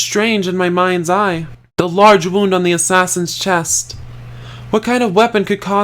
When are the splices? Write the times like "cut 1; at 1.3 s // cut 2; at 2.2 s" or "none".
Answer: cut 1; at 1.6 s